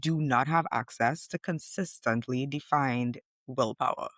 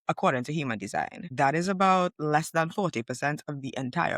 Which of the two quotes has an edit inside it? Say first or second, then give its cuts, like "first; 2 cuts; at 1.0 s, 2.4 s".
second; 1 cut; at 1.3 s